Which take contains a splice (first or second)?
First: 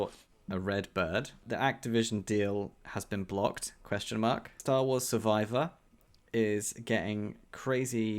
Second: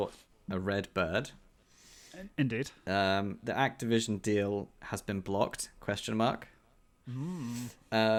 first